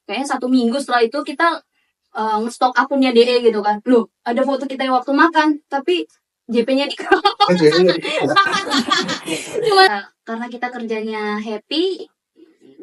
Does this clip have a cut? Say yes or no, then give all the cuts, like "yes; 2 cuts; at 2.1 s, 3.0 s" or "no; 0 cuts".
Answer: yes; 1 cut; at 9.9 s